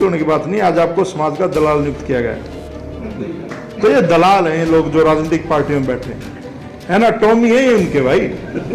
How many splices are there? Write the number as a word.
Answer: zero